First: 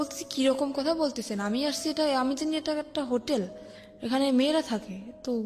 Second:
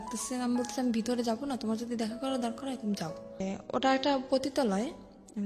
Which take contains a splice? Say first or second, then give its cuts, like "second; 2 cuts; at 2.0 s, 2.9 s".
second; 1 cut; at 3.5 s